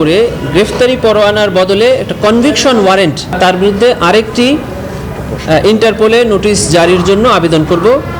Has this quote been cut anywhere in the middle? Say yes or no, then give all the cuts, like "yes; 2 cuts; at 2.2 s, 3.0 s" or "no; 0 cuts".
yes; 1 cut; at 3.4 s